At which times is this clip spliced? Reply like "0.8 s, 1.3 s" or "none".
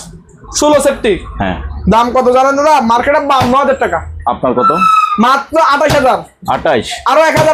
none